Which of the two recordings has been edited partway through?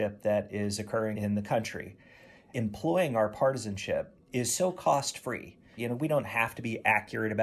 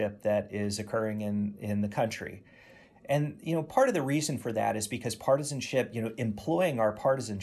first; 3 cuts; at 1.1 s, 2.5 s, 5.8 s

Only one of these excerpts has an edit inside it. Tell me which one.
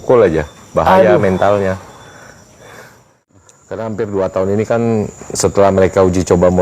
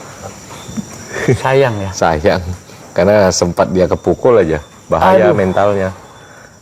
first; 1 cut; at 3.5 s

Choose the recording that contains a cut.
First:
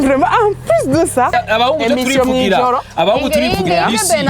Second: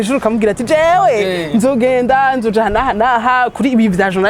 first; 1 cut; at 1.3 s

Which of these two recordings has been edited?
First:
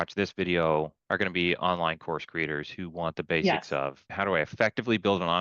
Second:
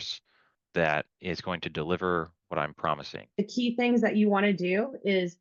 first; 2 cuts; at 1.0 s, 4.1 s

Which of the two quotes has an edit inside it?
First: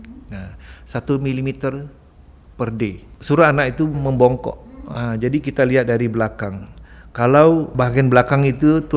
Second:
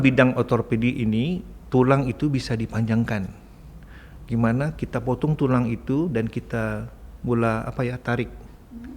first; 3 cuts; at 3.1 s, 4.0 s, 7.7 s

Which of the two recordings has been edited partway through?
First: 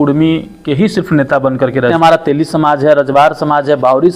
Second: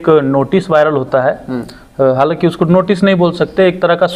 first; 1 cut; at 1.9 s

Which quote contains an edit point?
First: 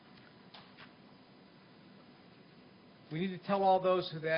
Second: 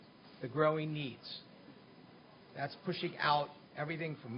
first; 1 cut; at 1.5 s

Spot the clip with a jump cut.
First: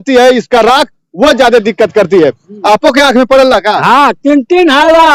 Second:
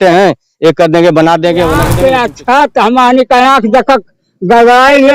second; 1 cut; at 1.9 s

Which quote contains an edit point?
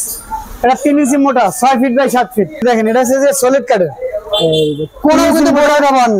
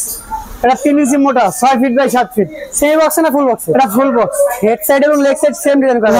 first; 1 cut; at 2.6 s

